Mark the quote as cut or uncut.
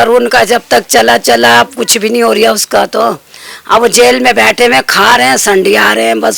uncut